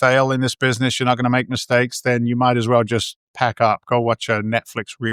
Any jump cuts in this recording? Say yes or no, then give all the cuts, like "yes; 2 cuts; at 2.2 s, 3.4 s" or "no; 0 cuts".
no; 0 cuts